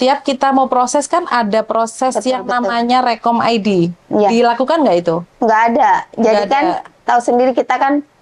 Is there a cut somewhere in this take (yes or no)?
no